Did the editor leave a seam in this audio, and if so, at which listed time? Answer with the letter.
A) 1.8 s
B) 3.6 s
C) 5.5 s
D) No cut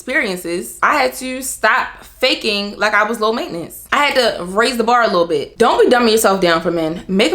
C